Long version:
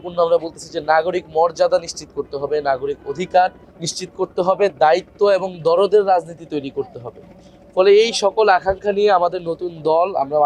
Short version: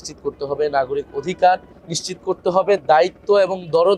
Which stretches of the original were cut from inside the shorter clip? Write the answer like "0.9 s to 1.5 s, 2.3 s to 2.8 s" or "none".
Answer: none